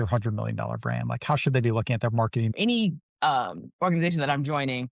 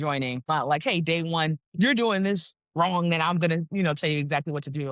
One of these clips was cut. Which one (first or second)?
first